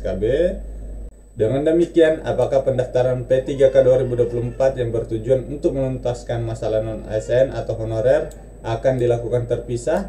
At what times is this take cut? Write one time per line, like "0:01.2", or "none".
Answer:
0:01.0